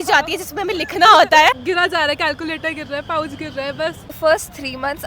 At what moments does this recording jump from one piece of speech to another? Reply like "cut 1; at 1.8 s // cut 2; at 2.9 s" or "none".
cut 1; at 1.6 s // cut 2; at 4.2 s